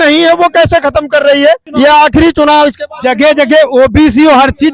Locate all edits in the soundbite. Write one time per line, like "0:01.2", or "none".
0:01.7